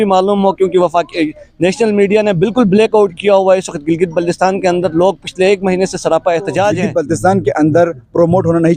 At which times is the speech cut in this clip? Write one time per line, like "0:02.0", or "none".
0:06.8